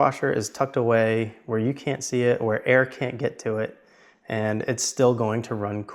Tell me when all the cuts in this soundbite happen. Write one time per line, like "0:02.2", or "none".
none